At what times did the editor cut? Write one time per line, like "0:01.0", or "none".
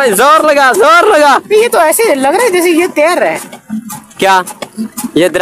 none